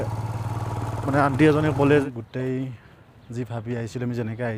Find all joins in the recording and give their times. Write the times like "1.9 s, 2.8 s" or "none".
2.0 s